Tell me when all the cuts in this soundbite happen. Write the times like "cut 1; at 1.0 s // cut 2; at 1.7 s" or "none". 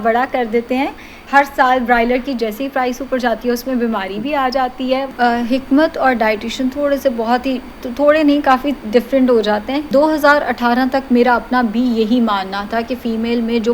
cut 1; at 1.2 s // cut 2; at 5.1 s // cut 3; at 9.9 s